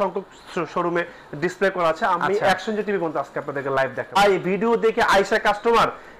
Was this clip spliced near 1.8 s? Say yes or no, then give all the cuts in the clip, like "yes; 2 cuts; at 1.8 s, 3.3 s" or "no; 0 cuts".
no; 1 cut; at 4.1 s